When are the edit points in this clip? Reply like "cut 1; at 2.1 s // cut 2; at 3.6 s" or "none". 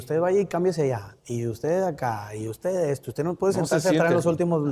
none